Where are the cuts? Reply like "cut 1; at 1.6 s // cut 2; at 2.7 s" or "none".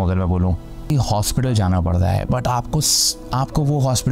cut 1; at 0.9 s

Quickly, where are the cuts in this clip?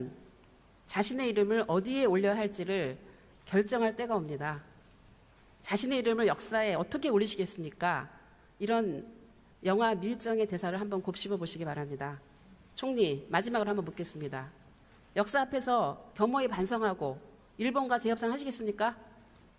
cut 1; at 6.7 s

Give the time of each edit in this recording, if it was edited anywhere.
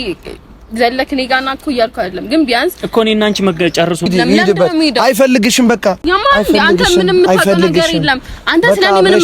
cut 1; at 4.1 s

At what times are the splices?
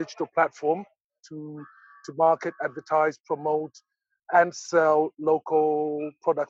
cut 1; at 1.2 s

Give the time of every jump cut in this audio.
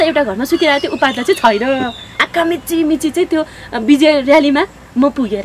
cut 1; at 2.2 s

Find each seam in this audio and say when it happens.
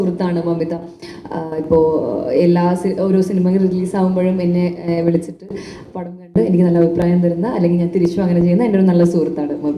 none

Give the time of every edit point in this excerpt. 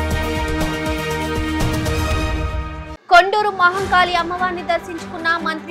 none

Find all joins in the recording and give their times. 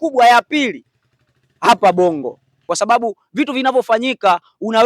cut 1; at 2.5 s

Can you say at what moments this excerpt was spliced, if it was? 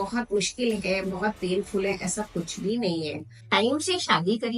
cut 1; at 3.4 s

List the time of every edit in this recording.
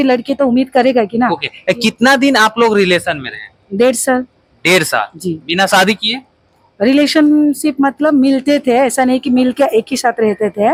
none

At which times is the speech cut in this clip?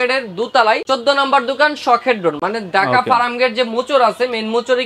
none

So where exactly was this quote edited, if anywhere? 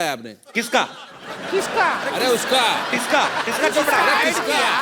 none

